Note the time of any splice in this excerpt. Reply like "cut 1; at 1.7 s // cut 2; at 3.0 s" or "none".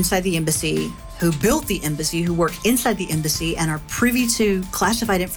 cut 1; at 3.3 s

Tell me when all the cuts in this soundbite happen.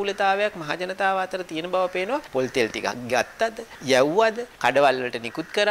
cut 1; at 2.3 s // cut 2; at 3.7 s // cut 3; at 4.5 s

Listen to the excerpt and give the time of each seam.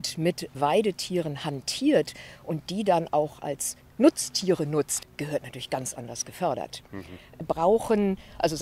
cut 1; at 4.9 s // cut 2; at 7.4 s

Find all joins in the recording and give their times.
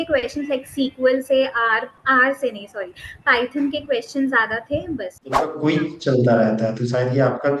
cut 1; at 5.2 s

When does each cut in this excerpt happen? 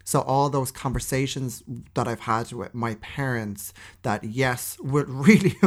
none

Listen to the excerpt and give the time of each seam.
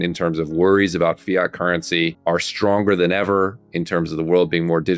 cut 1; at 2.2 s

